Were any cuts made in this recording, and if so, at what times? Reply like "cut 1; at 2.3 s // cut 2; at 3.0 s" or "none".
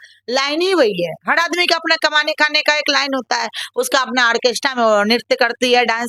none